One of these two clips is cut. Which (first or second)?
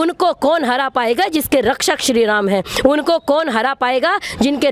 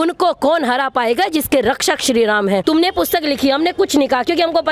second